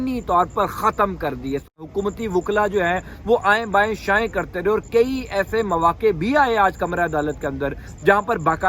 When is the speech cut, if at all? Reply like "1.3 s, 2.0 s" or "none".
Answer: 1.7 s